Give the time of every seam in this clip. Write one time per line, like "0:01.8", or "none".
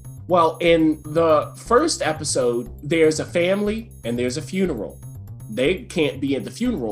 0:01.0